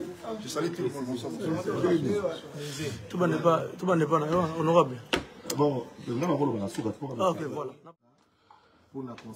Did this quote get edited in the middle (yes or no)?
yes